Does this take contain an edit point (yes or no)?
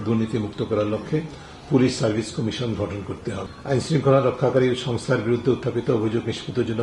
yes